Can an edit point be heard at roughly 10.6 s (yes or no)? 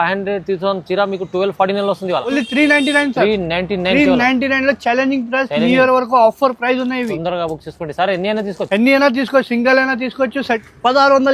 yes